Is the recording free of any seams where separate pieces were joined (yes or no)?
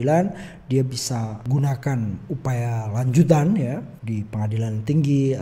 no